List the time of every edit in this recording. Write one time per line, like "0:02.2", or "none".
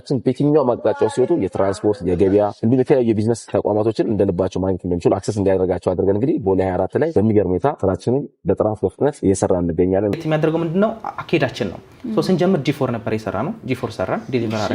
0:02.6
0:03.5
0:07.1
0:07.8
0:09.2
0:10.2